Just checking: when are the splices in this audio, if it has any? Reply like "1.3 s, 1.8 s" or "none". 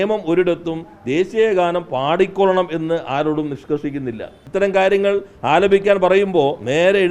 4.4 s